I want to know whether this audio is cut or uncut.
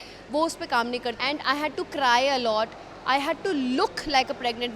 cut